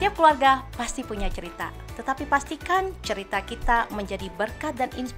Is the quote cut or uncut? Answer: uncut